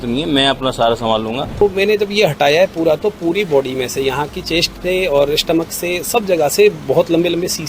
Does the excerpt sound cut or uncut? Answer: cut